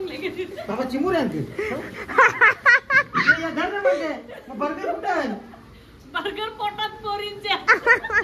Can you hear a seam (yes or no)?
no